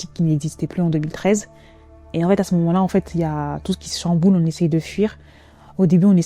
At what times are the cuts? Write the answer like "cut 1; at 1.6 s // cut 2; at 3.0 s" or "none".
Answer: none